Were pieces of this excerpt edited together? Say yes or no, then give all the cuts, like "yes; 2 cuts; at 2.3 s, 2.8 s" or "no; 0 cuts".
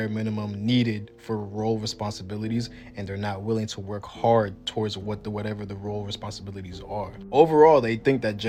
no; 0 cuts